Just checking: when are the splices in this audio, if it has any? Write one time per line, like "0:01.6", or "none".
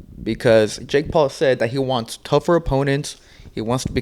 none